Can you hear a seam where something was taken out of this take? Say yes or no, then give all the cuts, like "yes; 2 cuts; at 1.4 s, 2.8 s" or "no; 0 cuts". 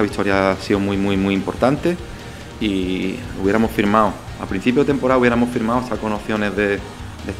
no; 0 cuts